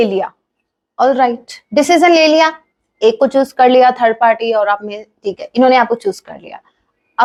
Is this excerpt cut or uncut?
uncut